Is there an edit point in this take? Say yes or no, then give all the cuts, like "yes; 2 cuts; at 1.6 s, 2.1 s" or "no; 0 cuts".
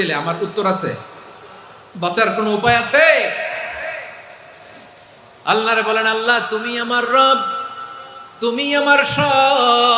yes; 1 cut; at 5.1 s